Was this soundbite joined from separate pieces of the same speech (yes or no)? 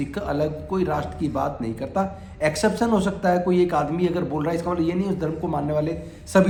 no